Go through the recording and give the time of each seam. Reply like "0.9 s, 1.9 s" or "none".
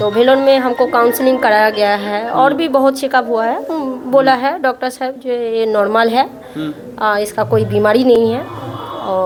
none